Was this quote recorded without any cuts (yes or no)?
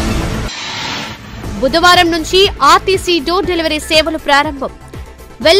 yes